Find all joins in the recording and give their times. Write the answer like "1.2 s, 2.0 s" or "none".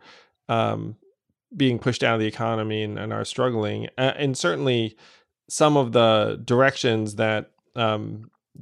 none